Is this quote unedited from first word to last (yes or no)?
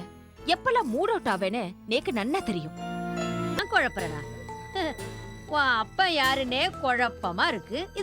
no